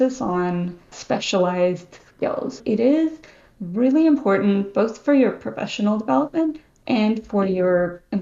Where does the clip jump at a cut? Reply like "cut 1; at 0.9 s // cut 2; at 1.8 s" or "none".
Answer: cut 1; at 0.9 s // cut 2; at 2.6 s